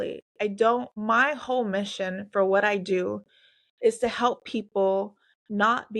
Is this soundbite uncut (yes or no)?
no